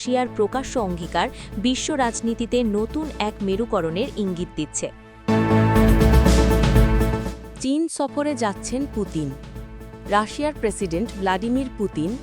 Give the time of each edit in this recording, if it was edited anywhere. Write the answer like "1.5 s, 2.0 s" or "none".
5.1 s